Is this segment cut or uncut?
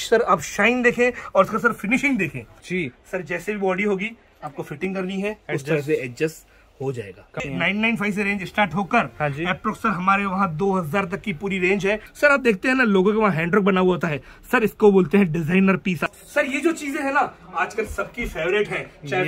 cut